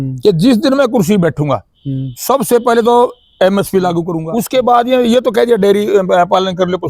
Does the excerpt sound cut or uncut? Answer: cut